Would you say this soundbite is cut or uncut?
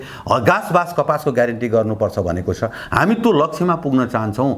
uncut